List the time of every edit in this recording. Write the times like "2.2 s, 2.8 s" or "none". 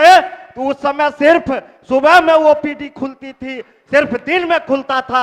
none